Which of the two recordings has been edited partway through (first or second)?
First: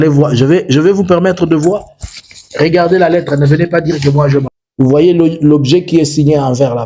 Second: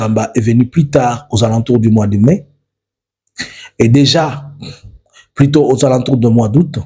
first